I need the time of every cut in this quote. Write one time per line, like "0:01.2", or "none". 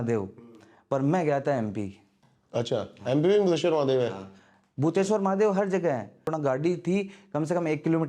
0:06.2